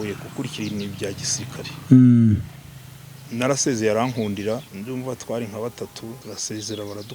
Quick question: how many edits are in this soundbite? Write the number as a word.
two